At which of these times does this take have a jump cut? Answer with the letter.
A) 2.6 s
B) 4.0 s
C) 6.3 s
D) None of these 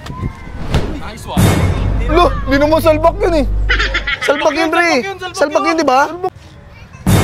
C